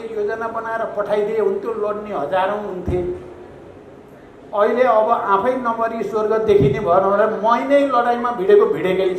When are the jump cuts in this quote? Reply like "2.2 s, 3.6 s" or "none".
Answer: none